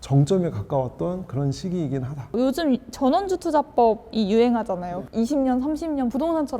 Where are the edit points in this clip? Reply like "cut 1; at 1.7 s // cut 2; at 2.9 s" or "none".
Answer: none